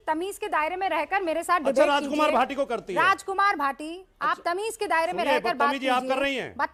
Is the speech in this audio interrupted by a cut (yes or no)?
no